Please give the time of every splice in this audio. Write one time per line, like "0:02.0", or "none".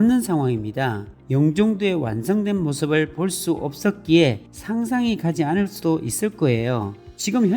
0:01.2